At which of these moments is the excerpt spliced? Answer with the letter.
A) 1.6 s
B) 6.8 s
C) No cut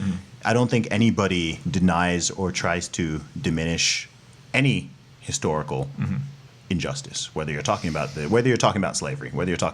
A